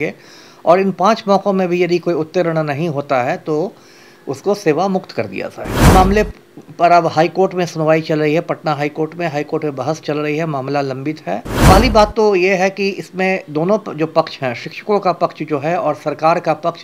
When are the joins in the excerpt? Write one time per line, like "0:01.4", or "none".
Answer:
0:05.9
0:11.5